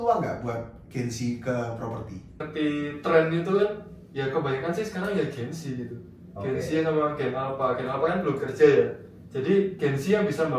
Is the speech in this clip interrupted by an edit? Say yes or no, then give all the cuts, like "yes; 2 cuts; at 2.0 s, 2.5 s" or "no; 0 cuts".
yes; 1 cut; at 2.5 s